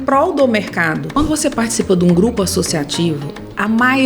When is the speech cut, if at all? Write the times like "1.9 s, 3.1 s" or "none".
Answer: 1.2 s